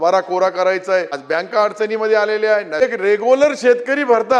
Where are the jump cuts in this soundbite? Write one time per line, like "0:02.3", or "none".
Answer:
0:01.2
0:02.8